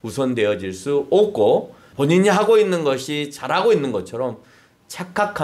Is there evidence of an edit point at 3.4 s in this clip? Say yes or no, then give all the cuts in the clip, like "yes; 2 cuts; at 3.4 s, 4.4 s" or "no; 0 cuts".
no; 1 cut; at 1.8 s